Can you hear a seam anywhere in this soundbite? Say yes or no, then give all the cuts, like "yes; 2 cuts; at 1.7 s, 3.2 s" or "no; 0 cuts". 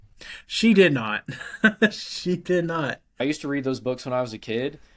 yes; 1 cut; at 3.2 s